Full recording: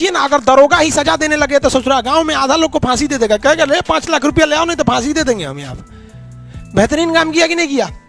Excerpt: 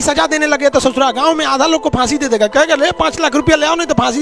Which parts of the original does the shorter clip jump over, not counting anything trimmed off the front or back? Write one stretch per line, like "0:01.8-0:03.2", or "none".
none